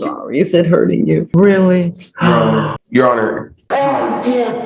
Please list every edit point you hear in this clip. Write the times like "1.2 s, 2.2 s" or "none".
1.3 s, 2.8 s, 3.5 s